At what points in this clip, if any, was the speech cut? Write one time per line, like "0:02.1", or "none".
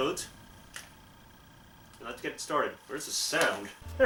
none